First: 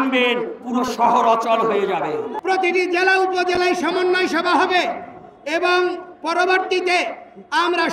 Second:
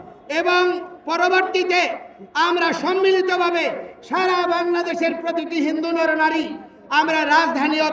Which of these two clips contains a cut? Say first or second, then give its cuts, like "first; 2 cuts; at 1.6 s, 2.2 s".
first; 1 cut; at 2.3 s